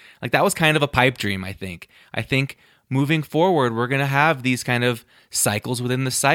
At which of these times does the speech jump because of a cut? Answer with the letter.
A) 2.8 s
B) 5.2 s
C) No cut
C